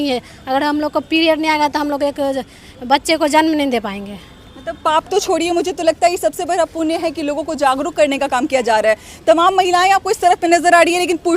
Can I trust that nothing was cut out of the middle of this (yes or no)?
yes